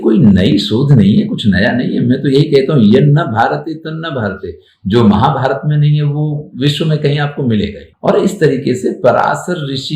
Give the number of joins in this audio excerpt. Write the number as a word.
zero